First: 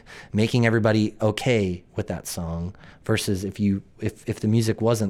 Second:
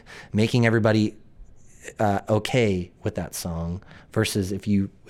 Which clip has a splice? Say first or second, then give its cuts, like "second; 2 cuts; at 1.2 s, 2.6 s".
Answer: first; 1 cut; at 1.2 s